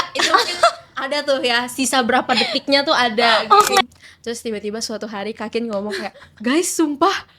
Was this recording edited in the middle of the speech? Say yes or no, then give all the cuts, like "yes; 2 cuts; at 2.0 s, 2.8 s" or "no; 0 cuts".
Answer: yes; 1 cut; at 3.8 s